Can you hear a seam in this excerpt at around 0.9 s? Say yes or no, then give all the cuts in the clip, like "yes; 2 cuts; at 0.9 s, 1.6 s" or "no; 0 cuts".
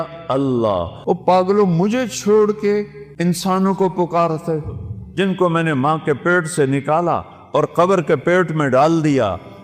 yes; 2 cuts; at 0.9 s, 3.0 s